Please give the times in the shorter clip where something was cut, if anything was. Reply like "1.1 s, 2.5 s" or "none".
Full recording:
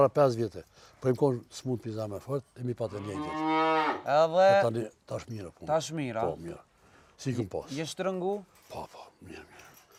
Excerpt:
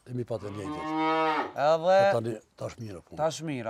none